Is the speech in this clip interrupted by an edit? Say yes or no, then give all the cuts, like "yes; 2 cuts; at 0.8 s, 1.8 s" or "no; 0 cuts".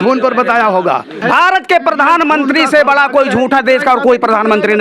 yes; 1 cut; at 1.2 s